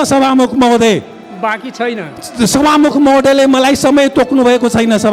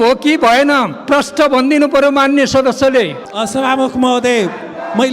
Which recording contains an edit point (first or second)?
second